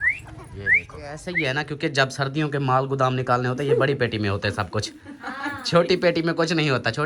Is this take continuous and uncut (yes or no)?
no